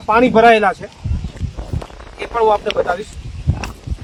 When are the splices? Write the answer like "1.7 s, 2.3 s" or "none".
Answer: none

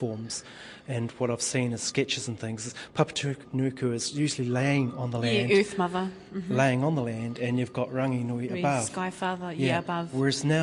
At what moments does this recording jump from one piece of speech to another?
none

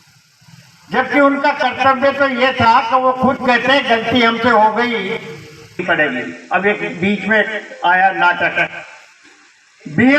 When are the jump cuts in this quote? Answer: 5.8 s

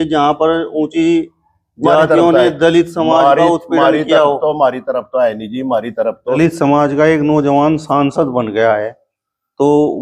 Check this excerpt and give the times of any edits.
6.4 s

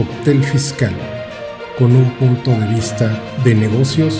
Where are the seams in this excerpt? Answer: none

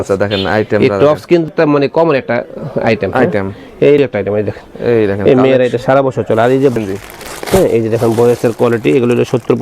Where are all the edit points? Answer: 1.5 s, 4.0 s, 6.8 s

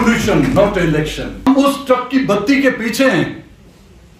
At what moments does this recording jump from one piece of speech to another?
1.5 s

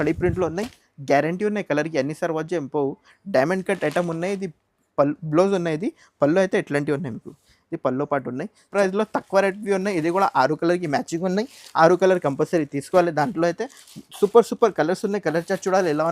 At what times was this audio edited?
8.7 s

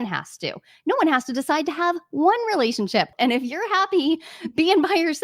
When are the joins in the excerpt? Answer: 3.1 s

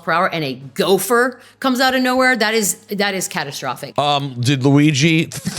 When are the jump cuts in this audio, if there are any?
3.8 s

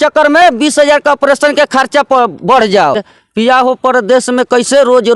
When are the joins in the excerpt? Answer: 2.7 s

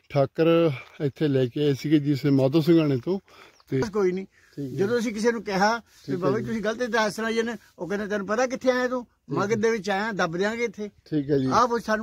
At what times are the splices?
3.8 s

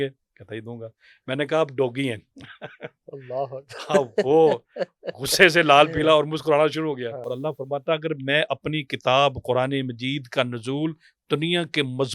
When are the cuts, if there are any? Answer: 7.2 s

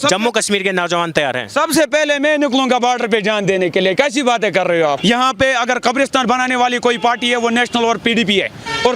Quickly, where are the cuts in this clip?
5.0 s

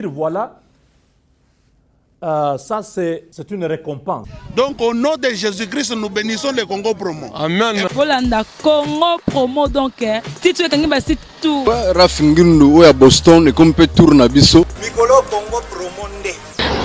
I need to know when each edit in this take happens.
4.4 s, 11.6 s, 14.8 s

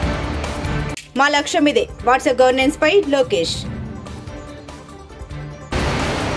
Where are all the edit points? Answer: 1.0 s

